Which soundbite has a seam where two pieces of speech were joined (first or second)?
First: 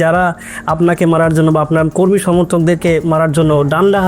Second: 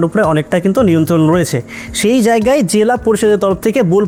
first